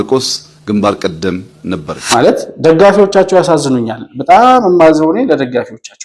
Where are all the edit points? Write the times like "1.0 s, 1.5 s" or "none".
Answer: 1.9 s